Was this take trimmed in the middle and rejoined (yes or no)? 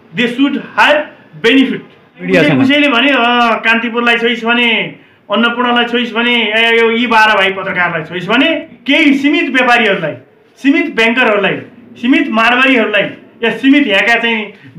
yes